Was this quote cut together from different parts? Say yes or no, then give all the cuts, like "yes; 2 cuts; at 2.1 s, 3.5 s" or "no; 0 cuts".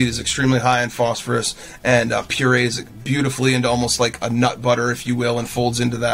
no; 0 cuts